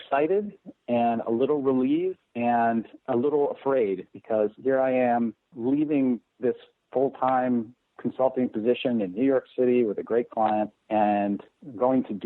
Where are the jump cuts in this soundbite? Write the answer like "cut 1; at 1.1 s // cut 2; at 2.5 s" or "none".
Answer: cut 1; at 2.7 s // cut 2; at 5.5 s // cut 3; at 10.8 s